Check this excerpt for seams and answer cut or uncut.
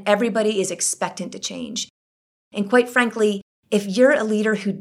uncut